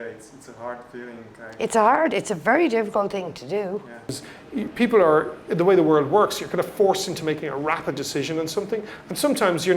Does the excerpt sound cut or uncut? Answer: cut